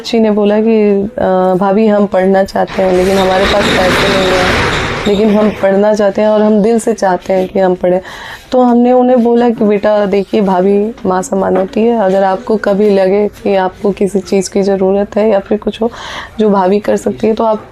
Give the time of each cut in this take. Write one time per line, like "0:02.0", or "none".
none